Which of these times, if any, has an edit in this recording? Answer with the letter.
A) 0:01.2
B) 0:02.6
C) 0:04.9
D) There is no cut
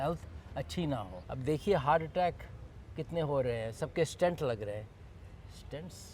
A